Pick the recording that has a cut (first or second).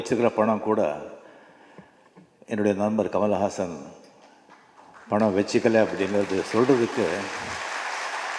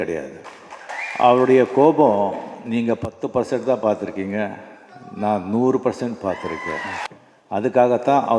second